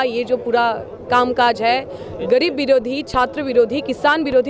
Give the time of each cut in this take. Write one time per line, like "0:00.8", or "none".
none